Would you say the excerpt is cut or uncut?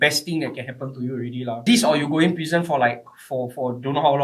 cut